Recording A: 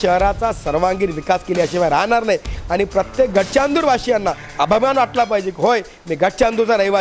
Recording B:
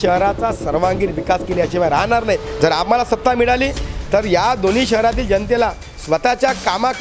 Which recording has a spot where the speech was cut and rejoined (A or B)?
B